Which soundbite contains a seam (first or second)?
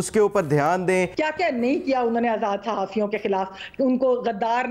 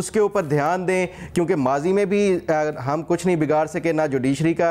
first